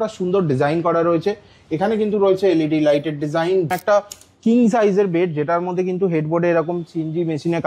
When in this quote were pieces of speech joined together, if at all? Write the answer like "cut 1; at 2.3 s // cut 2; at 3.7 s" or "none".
cut 1; at 3.7 s